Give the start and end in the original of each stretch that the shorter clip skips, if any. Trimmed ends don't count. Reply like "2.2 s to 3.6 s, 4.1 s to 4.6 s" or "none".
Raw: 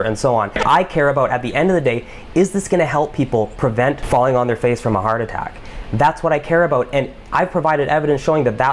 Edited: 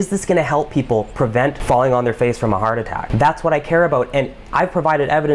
5.4 s to 5.8 s